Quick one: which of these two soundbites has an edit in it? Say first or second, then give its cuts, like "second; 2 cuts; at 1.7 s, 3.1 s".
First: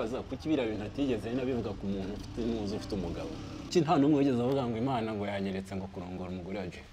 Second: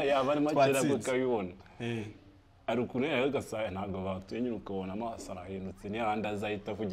first; 1 cut; at 3.7 s